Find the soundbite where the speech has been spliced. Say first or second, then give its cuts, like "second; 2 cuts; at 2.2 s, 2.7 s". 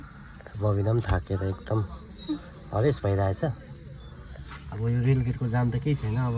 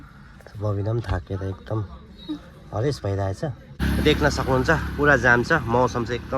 second; 1 cut; at 3.8 s